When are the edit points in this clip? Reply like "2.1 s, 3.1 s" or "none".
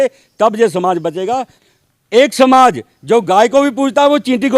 1.5 s